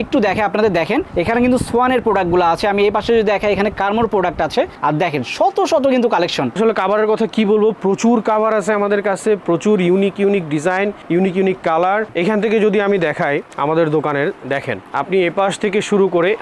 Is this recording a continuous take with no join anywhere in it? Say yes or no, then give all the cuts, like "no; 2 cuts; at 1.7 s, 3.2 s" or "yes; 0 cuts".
no; 2 cuts; at 6.6 s, 12.1 s